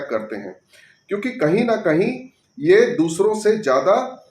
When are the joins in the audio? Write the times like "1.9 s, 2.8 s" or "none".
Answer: none